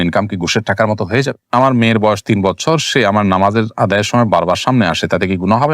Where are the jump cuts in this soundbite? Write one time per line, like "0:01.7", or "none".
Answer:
0:01.5

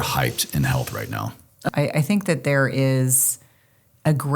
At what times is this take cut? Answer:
0:01.7

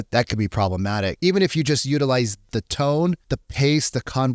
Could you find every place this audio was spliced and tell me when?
0:01.2
0:02.5
0:03.3

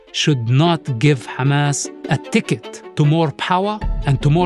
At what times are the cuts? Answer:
0:01.9
0:02.8

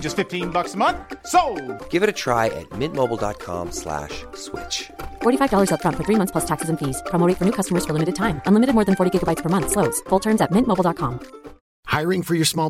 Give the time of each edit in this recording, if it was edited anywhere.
none

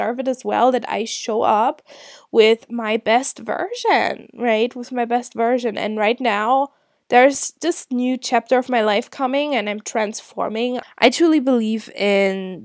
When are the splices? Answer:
0:10.9

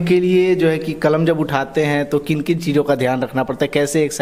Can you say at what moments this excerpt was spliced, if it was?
none

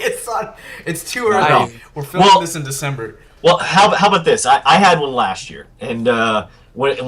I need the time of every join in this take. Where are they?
0:04.1

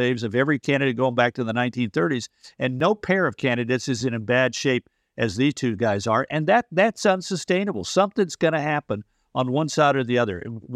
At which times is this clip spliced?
0:02.8
0:04.0

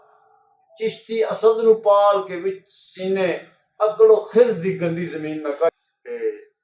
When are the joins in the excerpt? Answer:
0:05.7

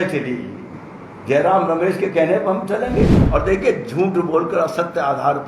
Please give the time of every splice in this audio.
0:03.2

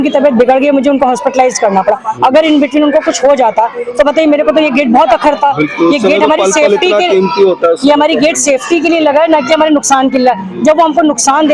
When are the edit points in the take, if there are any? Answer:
none

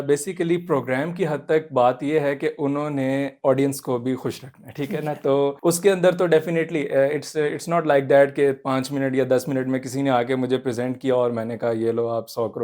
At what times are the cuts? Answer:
0:05.6

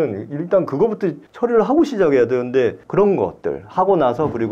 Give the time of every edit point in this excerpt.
0:01.2
0:02.8

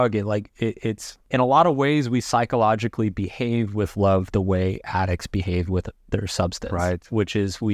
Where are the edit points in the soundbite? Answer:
0:01.1

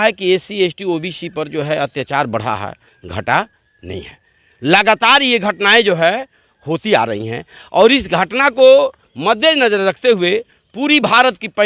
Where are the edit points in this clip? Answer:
none

